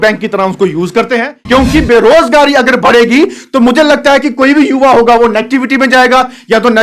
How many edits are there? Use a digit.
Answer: 1